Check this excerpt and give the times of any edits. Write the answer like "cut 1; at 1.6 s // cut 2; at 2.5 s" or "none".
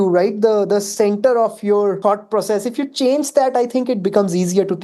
cut 1; at 2.0 s